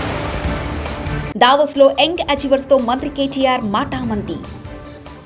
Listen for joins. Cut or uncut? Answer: cut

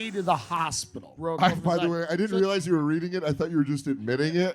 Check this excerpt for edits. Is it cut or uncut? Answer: cut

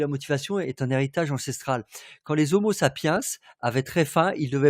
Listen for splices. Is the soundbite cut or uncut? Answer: uncut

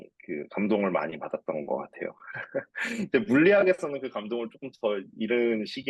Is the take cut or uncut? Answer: uncut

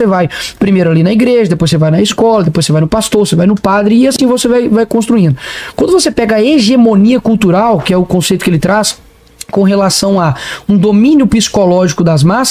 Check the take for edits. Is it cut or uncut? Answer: uncut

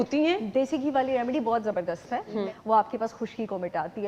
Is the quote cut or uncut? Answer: cut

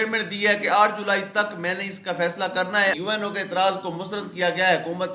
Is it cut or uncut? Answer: cut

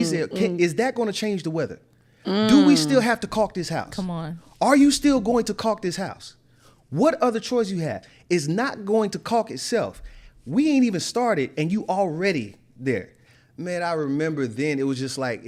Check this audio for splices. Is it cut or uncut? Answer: uncut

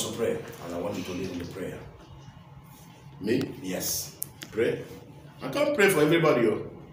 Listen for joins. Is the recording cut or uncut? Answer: uncut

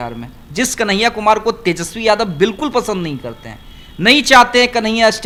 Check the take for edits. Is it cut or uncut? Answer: uncut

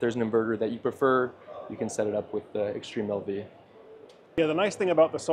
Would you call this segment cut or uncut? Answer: uncut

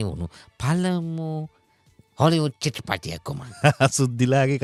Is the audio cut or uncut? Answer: uncut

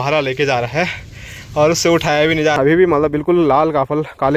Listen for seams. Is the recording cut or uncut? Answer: cut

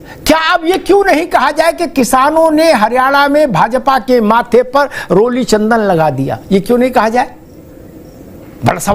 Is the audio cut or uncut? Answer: uncut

